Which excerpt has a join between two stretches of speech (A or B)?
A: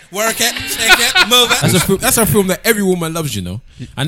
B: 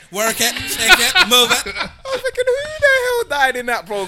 A